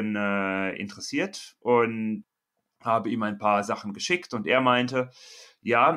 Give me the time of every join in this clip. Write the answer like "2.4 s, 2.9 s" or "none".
2.3 s